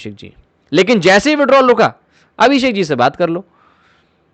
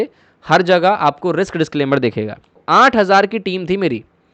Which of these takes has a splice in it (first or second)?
second